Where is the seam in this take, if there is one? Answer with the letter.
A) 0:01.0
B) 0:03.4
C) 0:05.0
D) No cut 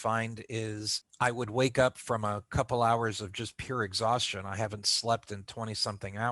A